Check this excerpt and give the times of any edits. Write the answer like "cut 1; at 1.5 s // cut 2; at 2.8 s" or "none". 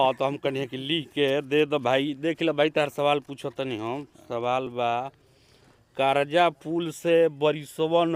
none